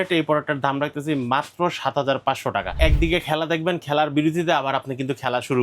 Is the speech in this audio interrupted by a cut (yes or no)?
yes